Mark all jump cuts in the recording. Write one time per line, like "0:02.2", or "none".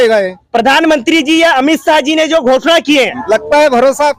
0:03.2